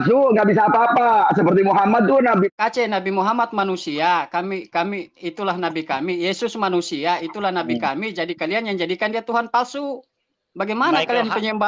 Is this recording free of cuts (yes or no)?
no